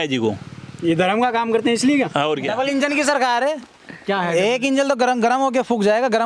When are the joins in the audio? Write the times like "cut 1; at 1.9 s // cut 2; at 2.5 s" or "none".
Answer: cut 1; at 2.5 s